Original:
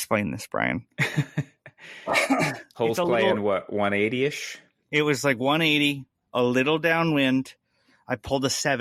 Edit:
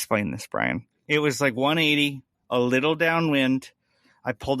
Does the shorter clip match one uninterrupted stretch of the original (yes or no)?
no